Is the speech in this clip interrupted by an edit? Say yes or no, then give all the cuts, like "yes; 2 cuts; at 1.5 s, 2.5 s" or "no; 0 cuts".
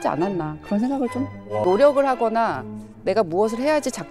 yes; 1 cut; at 1.6 s